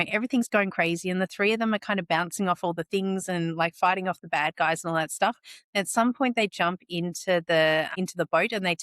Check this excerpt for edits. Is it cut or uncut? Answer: cut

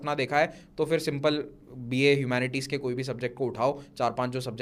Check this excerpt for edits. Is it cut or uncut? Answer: uncut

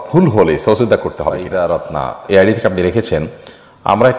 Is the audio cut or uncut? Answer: cut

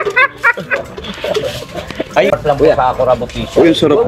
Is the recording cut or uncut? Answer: uncut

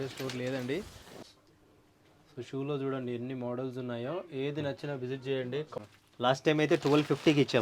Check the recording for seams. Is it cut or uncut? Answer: cut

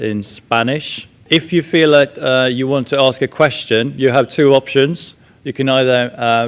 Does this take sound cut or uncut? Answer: cut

